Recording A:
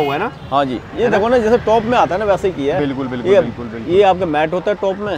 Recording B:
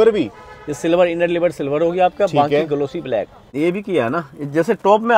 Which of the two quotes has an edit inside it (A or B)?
B